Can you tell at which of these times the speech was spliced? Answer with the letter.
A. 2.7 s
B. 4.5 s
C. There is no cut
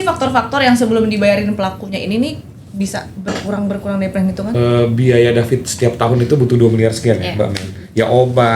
B